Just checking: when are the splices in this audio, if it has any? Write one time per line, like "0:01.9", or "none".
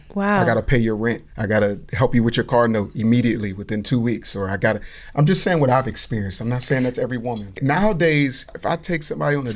0:01.3
0:07.6
0:08.5